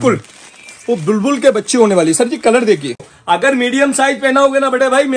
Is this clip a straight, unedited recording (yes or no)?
no